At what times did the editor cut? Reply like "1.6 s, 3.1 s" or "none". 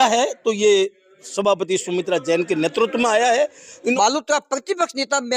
4.0 s